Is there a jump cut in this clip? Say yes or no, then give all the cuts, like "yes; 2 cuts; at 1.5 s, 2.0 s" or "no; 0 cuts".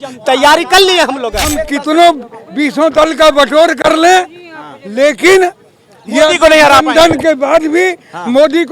yes; 1 cut; at 1.7 s